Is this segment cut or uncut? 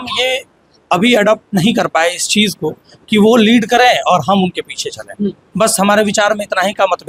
uncut